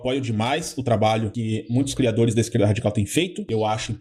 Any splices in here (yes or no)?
no